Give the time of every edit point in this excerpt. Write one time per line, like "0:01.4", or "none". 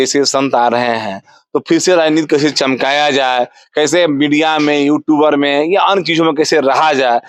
none